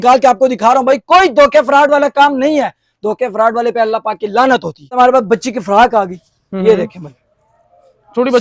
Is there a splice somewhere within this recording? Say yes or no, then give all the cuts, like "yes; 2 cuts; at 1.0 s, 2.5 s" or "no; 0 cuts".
yes; 1 cut; at 4.9 s